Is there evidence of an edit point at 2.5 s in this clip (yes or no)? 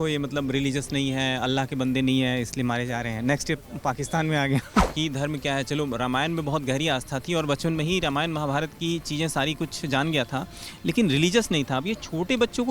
no